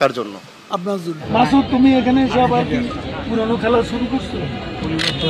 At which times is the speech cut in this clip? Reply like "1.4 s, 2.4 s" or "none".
1.2 s